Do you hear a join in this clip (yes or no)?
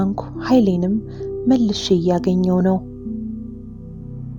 yes